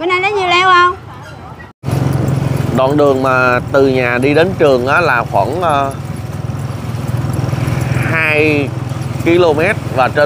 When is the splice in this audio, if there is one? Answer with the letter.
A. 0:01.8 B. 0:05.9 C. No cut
A